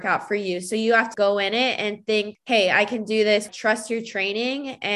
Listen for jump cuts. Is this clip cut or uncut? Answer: cut